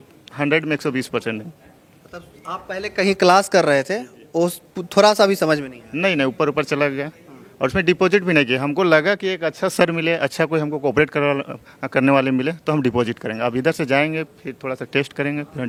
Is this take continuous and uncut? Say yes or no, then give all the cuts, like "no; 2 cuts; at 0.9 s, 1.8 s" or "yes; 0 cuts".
yes; 0 cuts